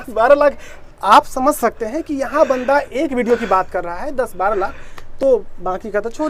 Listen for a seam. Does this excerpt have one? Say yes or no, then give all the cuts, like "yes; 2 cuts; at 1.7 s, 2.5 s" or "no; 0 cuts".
no; 0 cuts